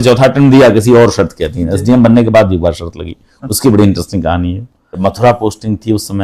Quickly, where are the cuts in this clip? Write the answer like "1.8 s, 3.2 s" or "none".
5.2 s